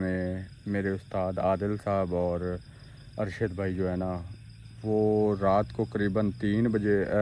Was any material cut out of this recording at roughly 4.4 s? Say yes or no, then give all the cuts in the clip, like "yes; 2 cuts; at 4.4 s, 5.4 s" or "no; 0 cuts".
no; 0 cuts